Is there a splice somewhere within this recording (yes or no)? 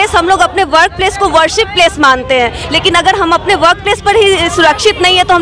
no